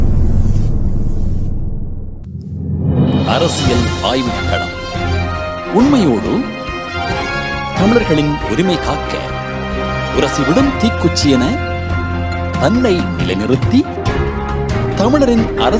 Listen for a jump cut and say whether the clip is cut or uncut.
uncut